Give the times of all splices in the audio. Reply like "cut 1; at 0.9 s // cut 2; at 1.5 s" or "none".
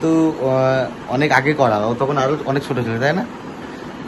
none